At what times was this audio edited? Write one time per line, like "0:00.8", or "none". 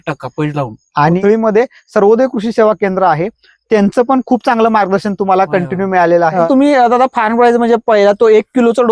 0:01.2
0:06.4